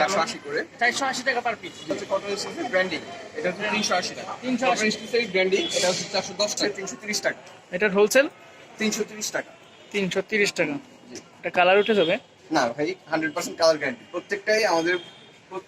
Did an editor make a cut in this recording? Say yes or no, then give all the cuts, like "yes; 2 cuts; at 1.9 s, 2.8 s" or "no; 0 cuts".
yes; 3 cuts; at 2.0 s, 4.8 s, 6.7 s